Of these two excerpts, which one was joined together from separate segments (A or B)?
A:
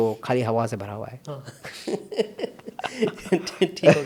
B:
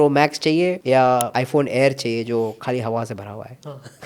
B